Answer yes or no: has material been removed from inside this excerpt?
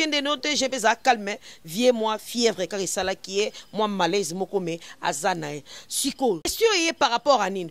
yes